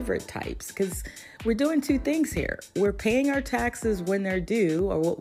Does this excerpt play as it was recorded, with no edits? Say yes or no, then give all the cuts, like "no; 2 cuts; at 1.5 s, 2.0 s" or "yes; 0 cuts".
yes; 0 cuts